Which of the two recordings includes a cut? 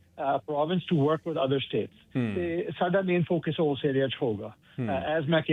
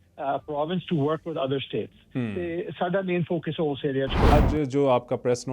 second; 1 cut; at 4.3 s

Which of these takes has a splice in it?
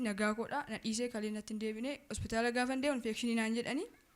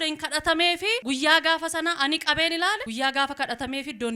second; 2 cuts; at 1.0 s, 2.9 s

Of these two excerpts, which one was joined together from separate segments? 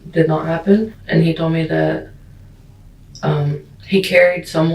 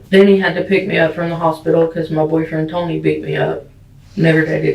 first; 1 cut; at 0.9 s

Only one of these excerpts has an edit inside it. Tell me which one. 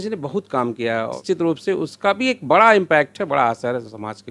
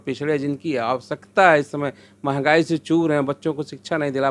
first; 1 cut; at 1.2 s

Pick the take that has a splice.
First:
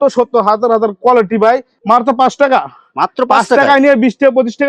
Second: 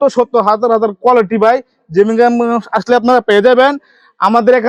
first; 1 cut; at 1.7 s

